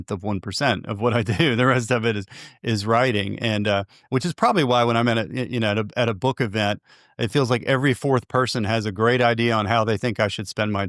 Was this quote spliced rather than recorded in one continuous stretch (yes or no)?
no